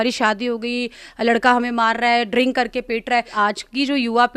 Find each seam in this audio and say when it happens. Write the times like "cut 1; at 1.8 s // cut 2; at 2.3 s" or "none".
cut 1; at 3.3 s

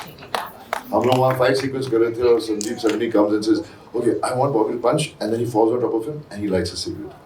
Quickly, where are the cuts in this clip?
none

